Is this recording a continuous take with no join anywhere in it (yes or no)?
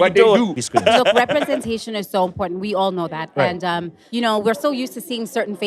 no